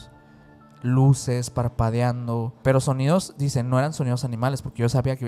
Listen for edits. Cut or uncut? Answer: cut